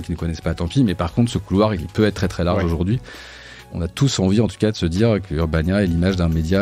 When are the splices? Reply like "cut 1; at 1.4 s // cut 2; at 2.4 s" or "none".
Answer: cut 1; at 1.8 s // cut 2; at 3.5 s // cut 3; at 5.2 s

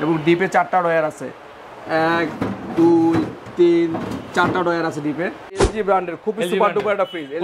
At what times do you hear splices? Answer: cut 1; at 5.7 s

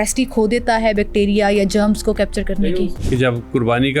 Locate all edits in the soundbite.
cut 1; at 2.6 s

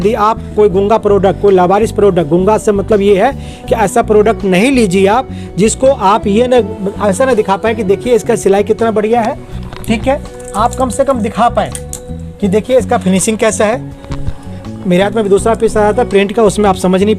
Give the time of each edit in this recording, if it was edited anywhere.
none

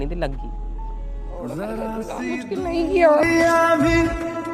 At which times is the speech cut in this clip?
none

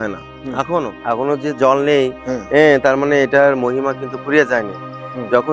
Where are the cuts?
cut 1; at 1.0 s

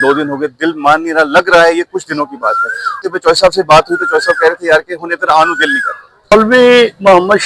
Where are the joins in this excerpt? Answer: cut 1; at 3.0 s // cut 2; at 6.3 s

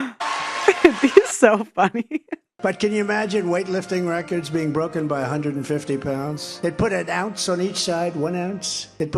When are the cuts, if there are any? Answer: cut 1; at 2.4 s // cut 2; at 6.5 s

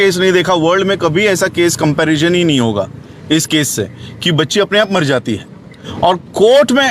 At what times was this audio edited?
cut 1; at 5.8 s

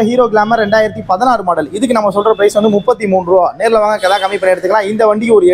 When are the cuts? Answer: none

